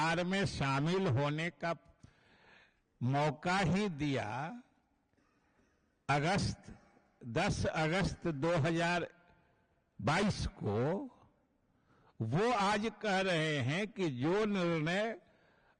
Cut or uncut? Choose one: uncut